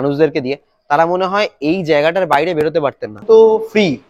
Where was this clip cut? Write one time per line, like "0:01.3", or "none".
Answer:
0:03.2